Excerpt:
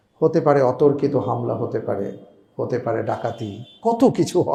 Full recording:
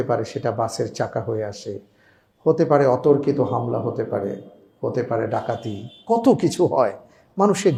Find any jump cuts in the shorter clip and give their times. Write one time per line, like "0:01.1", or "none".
none